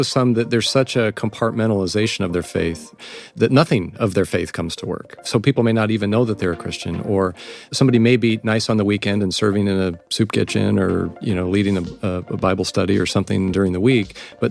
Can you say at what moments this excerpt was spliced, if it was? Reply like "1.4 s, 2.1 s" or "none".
3.0 s